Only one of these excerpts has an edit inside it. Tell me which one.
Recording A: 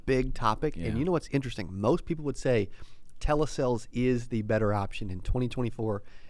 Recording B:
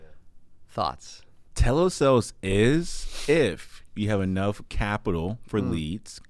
B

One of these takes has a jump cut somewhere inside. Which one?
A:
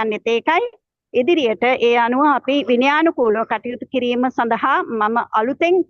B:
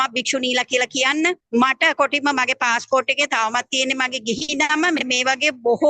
B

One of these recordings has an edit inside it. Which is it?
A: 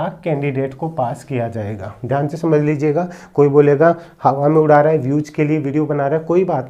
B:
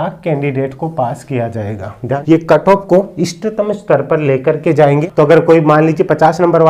B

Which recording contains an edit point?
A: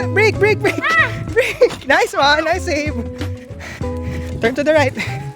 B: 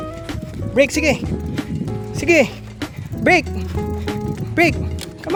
A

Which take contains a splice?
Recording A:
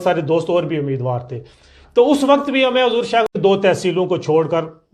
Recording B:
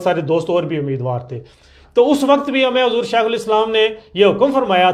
A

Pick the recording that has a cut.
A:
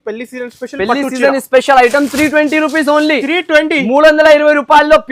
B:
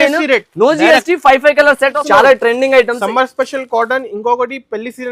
B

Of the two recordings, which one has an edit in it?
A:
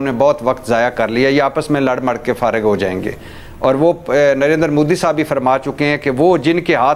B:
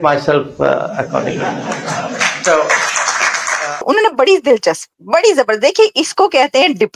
B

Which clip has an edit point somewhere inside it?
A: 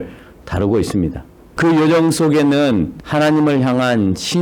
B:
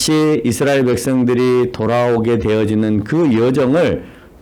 A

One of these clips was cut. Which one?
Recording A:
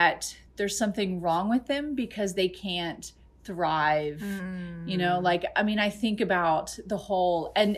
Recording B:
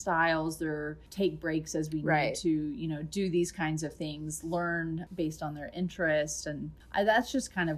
B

